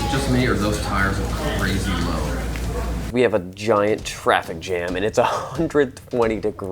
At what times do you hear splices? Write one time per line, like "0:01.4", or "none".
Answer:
0:03.1